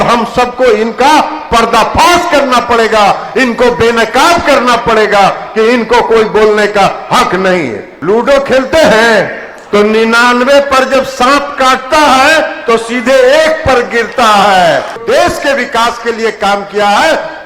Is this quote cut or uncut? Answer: cut